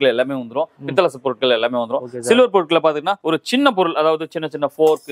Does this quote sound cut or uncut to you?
cut